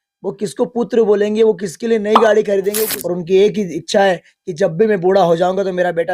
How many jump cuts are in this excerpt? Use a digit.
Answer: 1